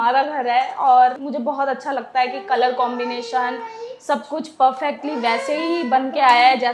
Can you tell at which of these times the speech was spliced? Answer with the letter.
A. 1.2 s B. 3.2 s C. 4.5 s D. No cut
A